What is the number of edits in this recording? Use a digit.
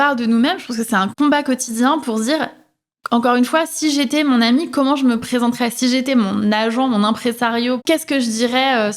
2